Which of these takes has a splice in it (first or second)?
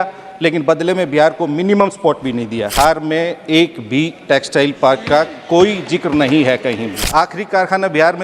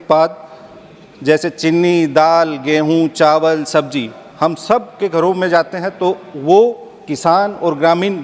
first